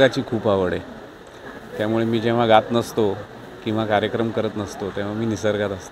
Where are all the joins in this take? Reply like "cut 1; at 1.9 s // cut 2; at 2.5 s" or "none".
none